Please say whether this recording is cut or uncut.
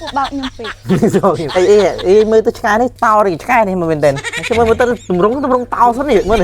cut